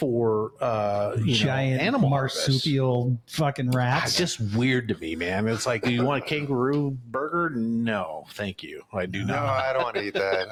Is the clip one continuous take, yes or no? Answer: yes